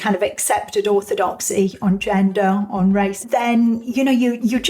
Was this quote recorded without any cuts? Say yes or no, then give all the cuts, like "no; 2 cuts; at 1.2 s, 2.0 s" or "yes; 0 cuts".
no; 1 cut; at 3.2 s